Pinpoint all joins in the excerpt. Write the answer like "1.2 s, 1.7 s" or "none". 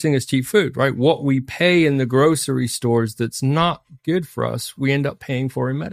none